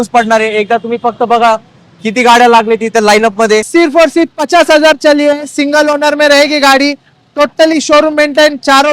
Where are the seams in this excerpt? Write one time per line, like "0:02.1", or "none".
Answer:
0:03.7